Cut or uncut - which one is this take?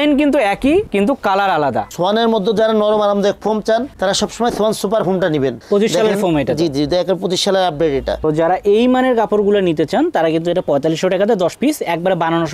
cut